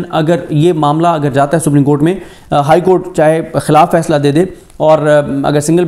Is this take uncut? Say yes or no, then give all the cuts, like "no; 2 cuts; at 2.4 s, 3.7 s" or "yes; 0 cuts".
yes; 0 cuts